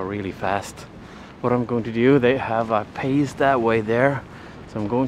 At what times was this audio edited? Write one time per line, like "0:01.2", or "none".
none